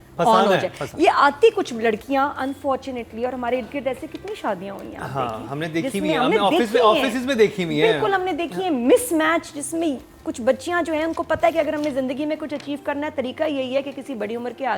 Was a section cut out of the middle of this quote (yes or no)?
no